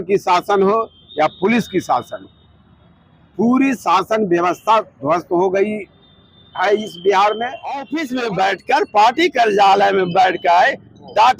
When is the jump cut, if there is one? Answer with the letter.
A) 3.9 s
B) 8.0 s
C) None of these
B